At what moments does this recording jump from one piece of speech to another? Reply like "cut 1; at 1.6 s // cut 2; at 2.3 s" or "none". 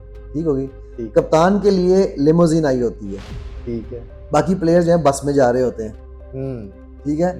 none